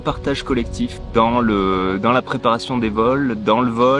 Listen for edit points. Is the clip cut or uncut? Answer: cut